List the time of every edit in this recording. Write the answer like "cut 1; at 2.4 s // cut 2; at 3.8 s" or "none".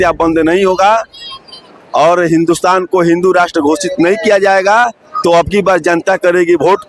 none